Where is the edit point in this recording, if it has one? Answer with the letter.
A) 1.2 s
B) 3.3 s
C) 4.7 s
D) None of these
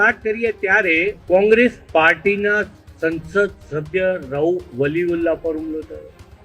A